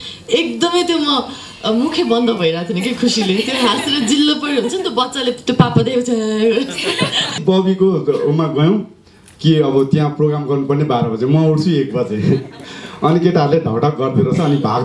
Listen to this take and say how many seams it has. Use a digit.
1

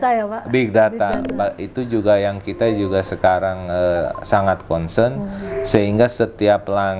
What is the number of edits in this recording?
0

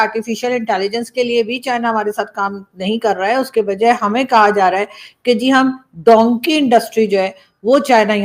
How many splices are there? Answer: 0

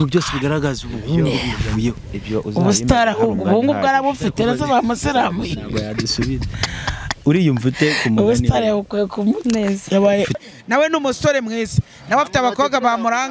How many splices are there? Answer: 1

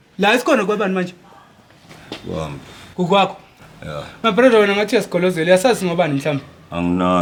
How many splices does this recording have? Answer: 0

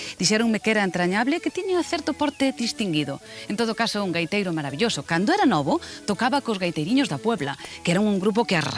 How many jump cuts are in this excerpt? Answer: 1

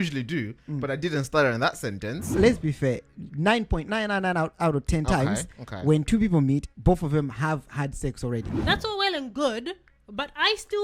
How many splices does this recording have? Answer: 2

